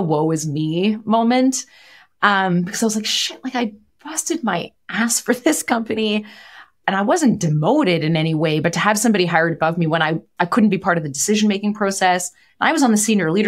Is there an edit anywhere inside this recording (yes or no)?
yes